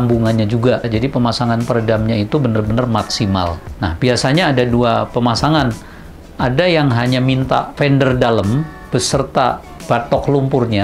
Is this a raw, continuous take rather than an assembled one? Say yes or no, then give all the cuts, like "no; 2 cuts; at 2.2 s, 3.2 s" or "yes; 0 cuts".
no; 1 cut; at 3.7 s